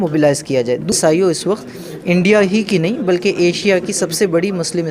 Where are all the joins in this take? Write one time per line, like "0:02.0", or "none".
0:00.9